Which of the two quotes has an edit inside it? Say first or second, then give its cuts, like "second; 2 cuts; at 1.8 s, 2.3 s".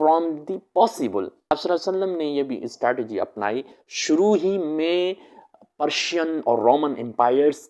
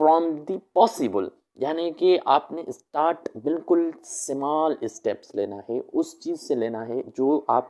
first; 2 cuts; at 1.5 s, 3.8 s